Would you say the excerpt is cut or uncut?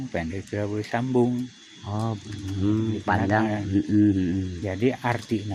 uncut